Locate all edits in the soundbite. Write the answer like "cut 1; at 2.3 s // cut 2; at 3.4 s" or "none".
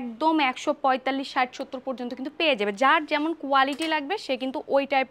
none